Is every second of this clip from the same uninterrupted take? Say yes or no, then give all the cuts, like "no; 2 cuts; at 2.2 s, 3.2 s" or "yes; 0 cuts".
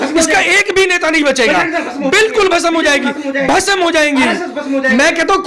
yes; 0 cuts